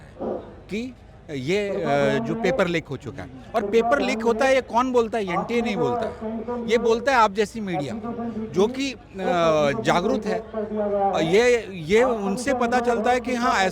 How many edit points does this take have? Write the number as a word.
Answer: zero